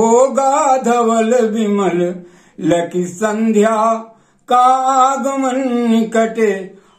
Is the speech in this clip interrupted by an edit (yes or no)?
no